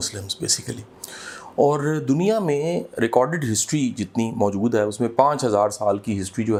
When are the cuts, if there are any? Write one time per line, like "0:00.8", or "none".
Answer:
none